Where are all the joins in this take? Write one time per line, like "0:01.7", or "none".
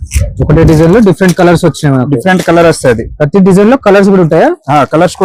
none